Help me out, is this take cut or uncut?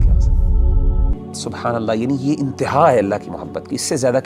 cut